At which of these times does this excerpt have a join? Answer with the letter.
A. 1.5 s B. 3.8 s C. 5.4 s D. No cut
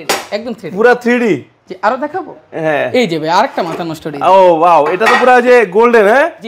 D